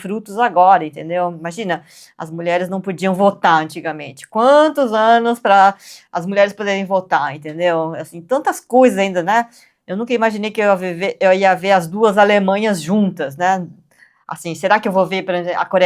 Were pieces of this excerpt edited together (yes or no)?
no